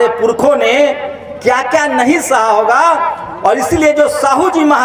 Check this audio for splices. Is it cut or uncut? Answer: uncut